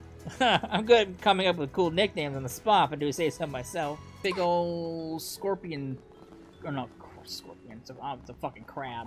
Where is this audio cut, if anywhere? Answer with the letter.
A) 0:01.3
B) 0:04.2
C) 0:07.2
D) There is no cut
B